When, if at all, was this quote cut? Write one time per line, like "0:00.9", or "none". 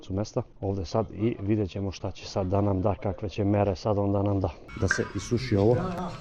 0:04.7

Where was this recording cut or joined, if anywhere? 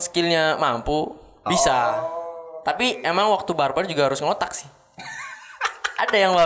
none

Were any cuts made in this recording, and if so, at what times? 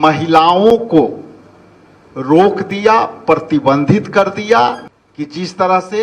0:04.9

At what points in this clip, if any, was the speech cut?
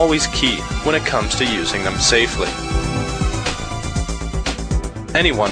none

